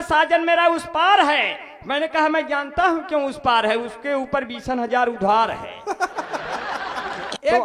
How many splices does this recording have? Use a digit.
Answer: 0